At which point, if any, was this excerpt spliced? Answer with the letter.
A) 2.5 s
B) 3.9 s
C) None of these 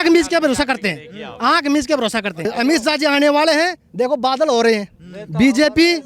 A